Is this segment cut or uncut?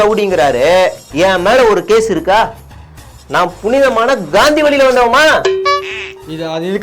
uncut